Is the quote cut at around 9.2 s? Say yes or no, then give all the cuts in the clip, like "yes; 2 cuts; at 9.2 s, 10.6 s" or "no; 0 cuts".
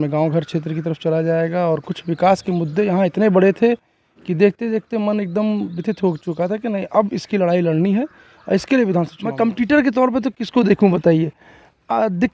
yes; 1 cut; at 9.2 s